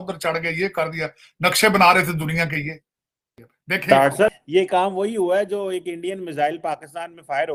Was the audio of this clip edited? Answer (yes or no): no